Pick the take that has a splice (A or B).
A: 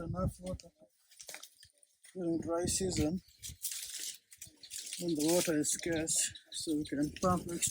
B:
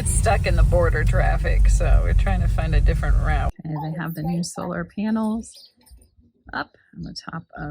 B